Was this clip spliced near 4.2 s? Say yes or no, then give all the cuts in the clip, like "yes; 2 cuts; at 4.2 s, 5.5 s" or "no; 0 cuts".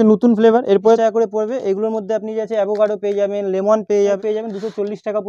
yes; 2 cuts; at 1.0 s, 4.2 s